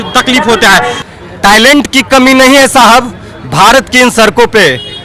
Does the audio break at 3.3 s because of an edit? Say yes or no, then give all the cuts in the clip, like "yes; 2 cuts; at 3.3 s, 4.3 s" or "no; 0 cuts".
no; 1 cut; at 1.0 s